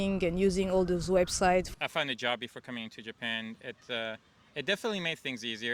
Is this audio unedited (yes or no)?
no